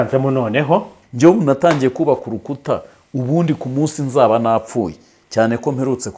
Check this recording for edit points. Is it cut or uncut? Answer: cut